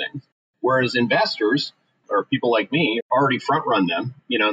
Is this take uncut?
no; 2 cuts; at 2.0 s, 3.1 s

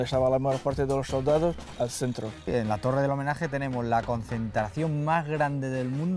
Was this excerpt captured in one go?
no; 1 cut; at 2.5 s

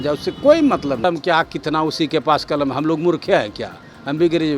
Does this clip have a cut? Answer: yes; 1 cut; at 1.0 s

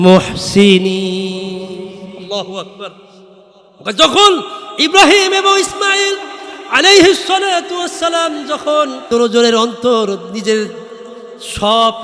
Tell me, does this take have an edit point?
yes; 1 cut; at 9.1 s

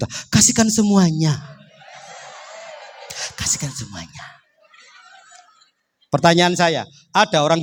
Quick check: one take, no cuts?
yes; 0 cuts

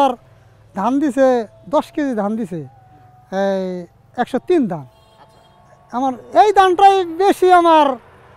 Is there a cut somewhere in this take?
no; 0 cuts

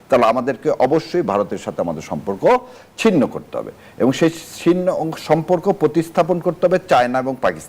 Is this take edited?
no; 0 cuts

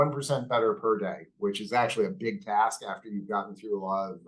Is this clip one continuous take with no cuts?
yes; 0 cuts

